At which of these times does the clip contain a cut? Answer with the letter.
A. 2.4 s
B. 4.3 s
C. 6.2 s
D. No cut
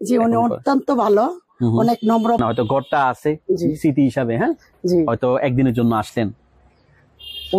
A